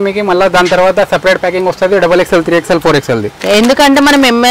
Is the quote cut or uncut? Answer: uncut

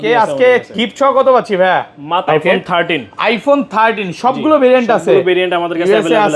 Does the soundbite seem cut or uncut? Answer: cut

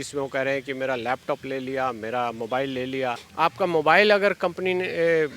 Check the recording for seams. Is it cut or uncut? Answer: cut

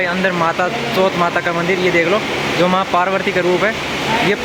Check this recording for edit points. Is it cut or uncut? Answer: uncut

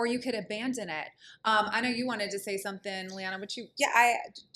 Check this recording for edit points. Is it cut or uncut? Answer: uncut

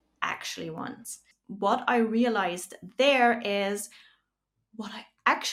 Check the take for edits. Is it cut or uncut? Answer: uncut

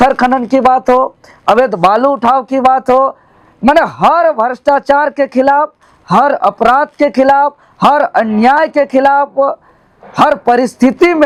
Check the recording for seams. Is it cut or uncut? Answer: uncut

